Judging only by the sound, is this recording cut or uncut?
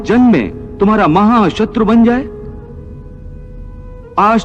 uncut